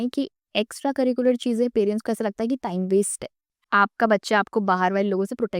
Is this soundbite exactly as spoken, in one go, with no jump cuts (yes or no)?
no